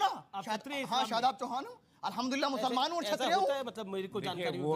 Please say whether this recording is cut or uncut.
uncut